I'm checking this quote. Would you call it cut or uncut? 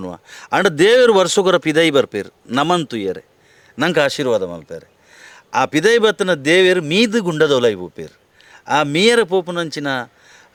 uncut